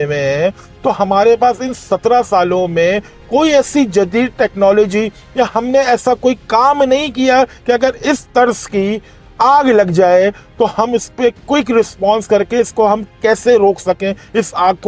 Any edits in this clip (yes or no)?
no